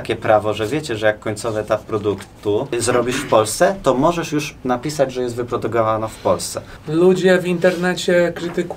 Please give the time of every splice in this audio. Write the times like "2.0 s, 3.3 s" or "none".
2.8 s, 6.7 s